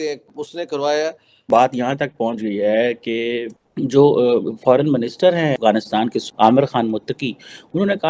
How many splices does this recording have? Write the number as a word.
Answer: two